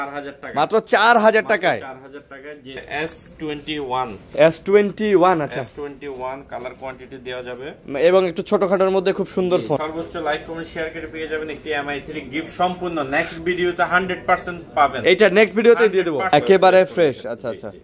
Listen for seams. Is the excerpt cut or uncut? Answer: cut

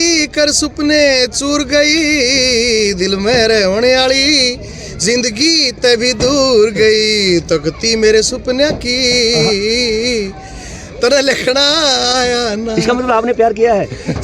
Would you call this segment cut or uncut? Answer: uncut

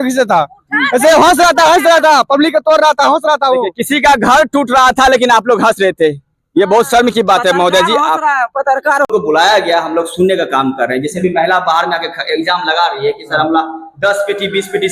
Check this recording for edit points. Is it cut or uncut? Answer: cut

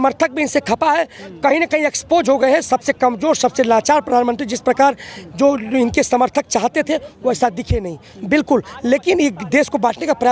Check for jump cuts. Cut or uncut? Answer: uncut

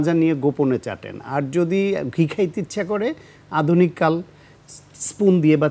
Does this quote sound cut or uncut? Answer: uncut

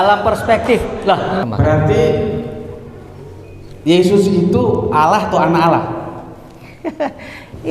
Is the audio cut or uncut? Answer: cut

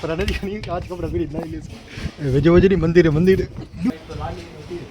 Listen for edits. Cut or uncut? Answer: cut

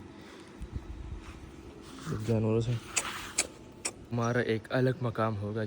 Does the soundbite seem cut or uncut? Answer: cut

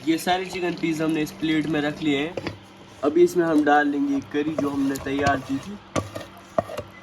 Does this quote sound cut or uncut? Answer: cut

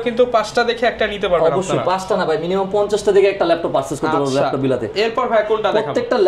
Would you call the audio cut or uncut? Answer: uncut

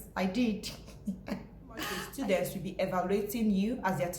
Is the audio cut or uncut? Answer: cut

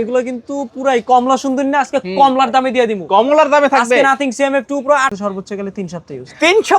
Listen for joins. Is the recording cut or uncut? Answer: cut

